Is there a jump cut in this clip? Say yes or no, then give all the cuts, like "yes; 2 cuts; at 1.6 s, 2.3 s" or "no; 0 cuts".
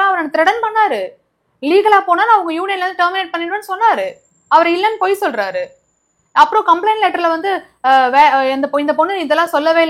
no; 0 cuts